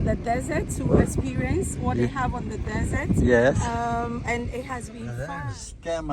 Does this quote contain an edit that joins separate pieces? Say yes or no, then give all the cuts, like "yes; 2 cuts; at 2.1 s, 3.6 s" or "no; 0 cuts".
yes; 1 cut; at 5.2 s